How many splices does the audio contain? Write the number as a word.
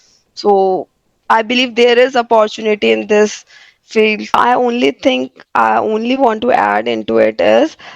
one